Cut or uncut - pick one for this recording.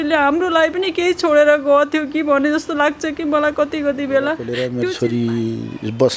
cut